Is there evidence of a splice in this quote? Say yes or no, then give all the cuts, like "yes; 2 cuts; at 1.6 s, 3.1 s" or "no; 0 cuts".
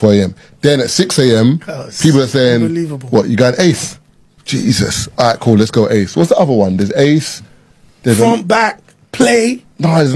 no; 0 cuts